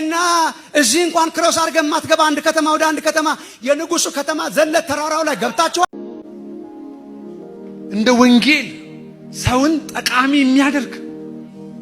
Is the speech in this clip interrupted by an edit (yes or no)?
yes